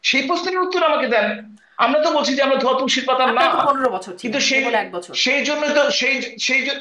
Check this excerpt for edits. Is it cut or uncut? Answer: uncut